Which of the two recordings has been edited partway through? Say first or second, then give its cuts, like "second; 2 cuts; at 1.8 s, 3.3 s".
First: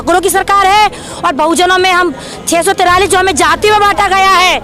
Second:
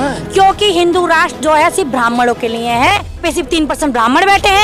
second; 1 cut; at 3.2 s